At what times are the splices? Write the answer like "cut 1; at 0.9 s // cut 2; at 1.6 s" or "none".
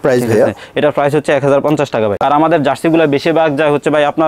cut 1; at 2.2 s